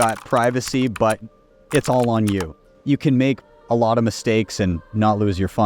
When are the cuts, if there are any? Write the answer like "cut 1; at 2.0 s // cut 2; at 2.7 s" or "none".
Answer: cut 1; at 2.7 s